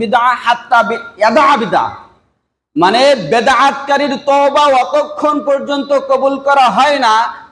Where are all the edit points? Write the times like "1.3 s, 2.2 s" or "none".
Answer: none